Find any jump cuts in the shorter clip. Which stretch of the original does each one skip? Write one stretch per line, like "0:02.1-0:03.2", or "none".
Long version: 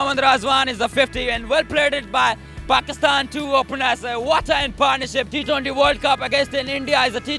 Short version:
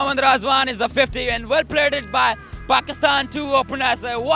none